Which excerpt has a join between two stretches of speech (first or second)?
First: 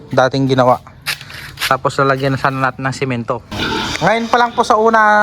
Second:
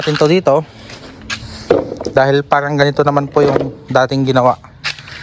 first